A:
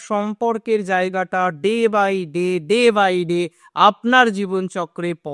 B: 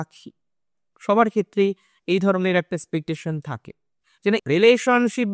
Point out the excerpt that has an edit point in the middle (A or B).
B